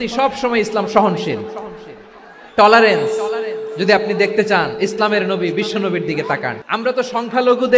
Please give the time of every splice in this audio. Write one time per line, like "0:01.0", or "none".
0:06.6